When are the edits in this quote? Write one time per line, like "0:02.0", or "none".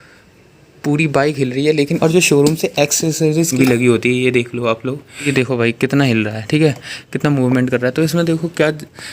0:01.9
0:03.5
0:05.3